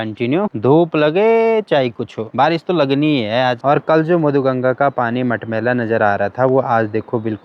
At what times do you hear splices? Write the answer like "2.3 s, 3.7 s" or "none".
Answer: none